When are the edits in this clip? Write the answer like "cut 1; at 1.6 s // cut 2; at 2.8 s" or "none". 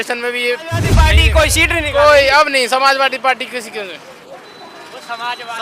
cut 1; at 1.1 s